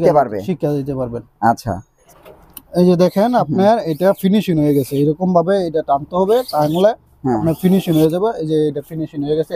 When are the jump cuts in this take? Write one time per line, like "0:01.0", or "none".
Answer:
0:01.9